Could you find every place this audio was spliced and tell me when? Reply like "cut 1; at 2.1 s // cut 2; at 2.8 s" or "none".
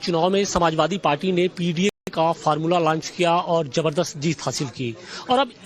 cut 1; at 1.1 s